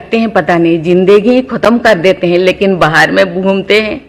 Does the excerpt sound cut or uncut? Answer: uncut